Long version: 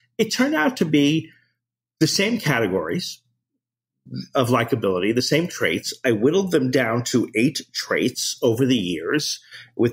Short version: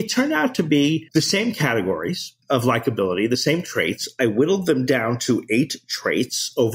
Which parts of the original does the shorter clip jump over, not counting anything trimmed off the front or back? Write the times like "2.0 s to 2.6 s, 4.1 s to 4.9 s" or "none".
1.3 s to 1.9 s, 3.2 s to 4.2 s